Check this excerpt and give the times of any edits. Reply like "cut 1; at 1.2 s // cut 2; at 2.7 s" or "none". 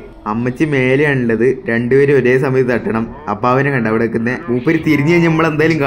cut 1; at 4.4 s